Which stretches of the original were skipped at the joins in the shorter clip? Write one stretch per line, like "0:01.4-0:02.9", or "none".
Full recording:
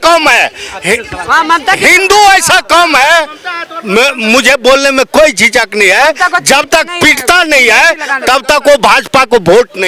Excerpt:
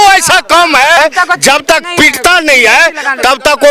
0:03.2-0:06.0